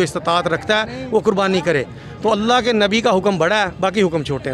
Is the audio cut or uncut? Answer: uncut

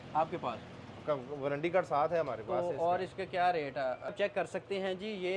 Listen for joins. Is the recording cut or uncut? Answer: cut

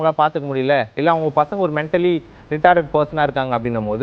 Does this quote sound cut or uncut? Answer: uncut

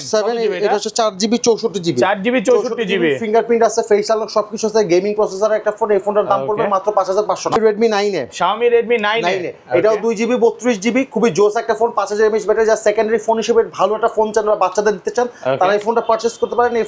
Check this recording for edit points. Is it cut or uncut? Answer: cut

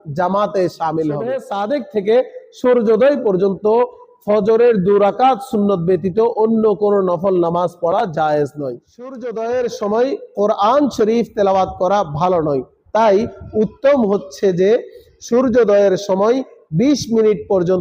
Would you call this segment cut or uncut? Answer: cut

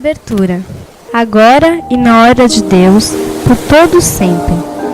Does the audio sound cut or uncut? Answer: cut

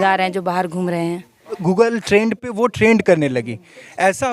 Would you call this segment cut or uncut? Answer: cut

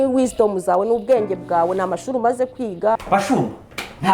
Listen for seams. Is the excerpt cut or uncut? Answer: cut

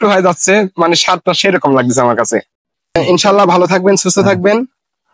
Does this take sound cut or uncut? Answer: cut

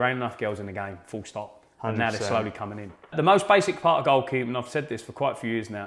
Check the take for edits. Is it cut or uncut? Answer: cut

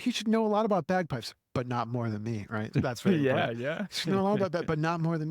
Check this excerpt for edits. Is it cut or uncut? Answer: cut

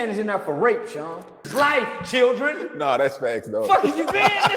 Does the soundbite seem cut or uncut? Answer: cut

